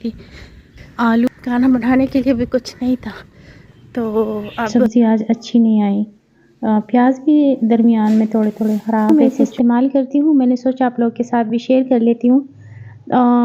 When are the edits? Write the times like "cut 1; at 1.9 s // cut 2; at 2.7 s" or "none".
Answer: cut 1; at 1.3 s // cut 2; at 4.6 s // cut 3; at 9.1 s